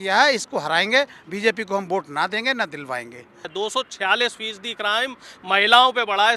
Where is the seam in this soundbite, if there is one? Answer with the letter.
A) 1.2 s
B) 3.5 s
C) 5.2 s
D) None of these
B